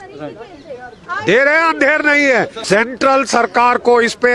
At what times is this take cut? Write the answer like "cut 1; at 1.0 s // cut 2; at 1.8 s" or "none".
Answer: cut 1; at 2.6 s